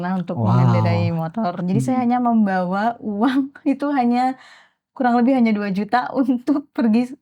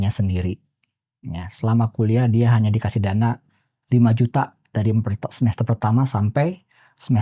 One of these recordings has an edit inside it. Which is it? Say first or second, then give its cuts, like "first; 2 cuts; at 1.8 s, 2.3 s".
first; 1 cut; at 1.6 s